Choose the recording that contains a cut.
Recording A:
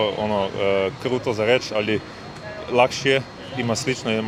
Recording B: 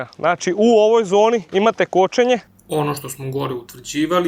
B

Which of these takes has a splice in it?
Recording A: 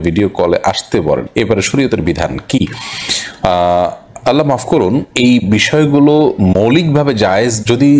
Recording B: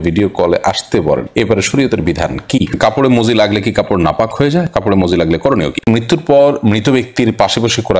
B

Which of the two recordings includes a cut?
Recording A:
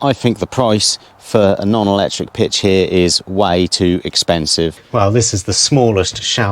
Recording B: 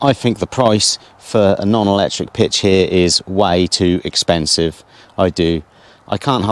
A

